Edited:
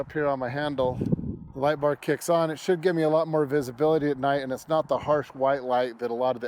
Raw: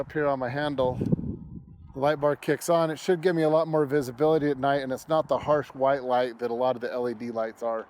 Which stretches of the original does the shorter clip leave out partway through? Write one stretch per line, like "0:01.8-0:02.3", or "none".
0:01.4-0:01.8